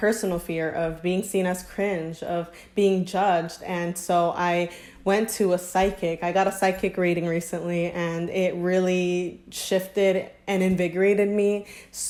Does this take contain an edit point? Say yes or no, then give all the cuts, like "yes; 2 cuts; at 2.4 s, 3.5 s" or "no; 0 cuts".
no; 0 cuts